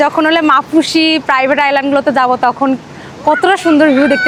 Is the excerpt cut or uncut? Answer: uncut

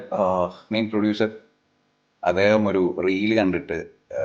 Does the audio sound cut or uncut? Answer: uncut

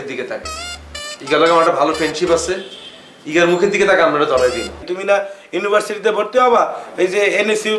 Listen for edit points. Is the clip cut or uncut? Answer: cut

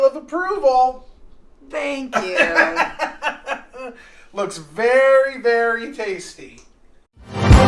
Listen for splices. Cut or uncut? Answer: cut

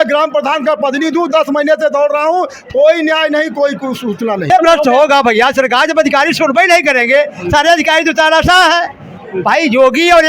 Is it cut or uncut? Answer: cut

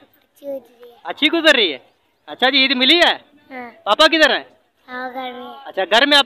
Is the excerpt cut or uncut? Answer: uncut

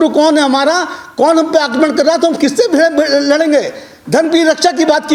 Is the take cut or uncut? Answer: uncut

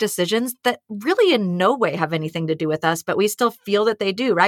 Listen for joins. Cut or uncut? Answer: uncut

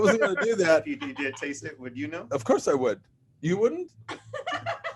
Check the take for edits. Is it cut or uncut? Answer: cut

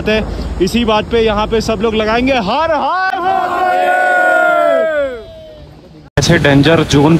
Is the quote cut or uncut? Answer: uncut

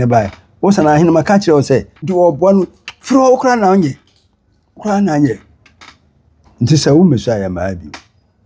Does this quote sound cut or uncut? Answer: cut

